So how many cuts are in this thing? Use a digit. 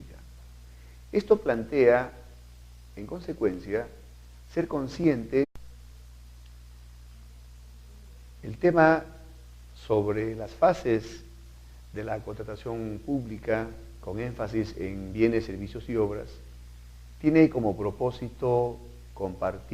0